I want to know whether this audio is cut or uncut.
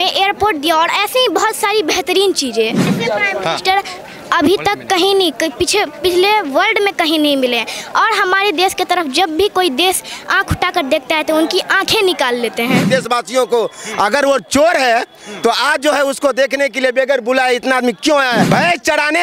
cut